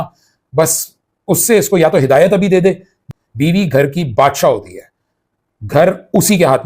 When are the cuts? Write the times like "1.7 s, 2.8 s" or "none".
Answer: 3.0 s